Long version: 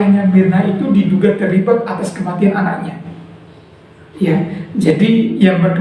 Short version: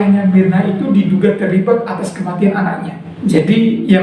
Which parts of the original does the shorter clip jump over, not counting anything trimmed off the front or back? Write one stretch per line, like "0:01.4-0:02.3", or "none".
0:03.1-0:04.6